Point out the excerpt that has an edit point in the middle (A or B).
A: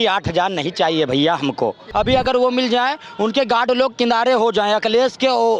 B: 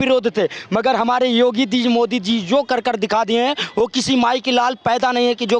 A